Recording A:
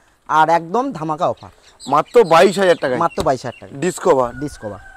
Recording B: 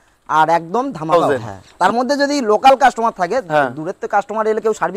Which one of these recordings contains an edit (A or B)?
B